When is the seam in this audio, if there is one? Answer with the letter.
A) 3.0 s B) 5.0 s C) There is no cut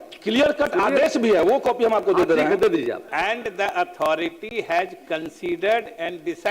A